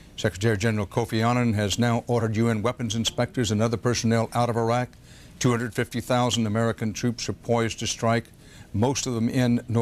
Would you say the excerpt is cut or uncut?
uncut